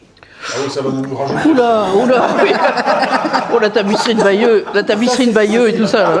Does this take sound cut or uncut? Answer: uncut